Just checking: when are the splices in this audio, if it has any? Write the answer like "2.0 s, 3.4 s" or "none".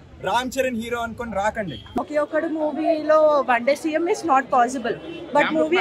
2.0 s